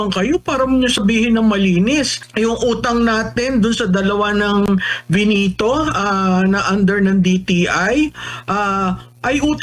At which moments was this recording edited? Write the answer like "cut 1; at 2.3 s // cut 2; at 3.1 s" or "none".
cut 1; at 2.2 s